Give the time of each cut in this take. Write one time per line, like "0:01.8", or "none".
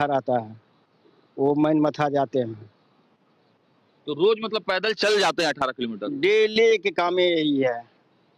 none